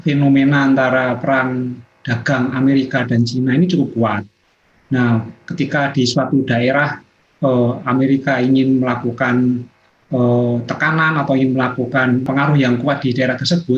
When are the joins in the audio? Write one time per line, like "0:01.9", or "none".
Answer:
0:12.3

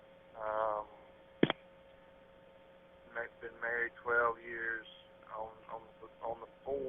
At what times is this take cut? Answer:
0:05.5

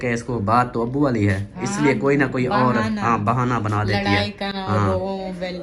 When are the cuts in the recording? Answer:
none

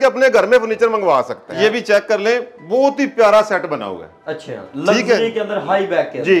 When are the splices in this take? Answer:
0:01.4

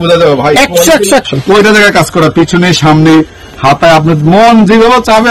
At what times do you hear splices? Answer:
0:01.3

